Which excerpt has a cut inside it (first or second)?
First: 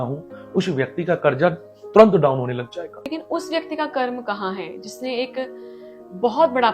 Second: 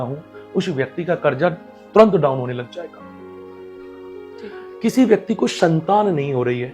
first